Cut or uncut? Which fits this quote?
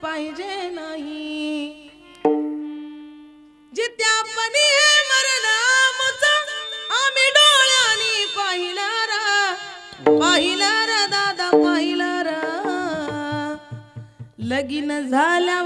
uncut